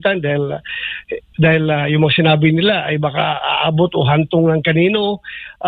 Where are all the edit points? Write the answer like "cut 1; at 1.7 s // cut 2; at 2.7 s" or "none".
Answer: none